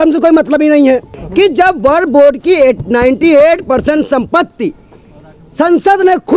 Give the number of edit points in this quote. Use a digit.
1